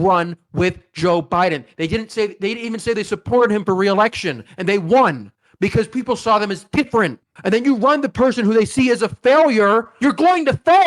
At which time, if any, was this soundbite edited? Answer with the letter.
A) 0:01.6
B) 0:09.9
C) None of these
B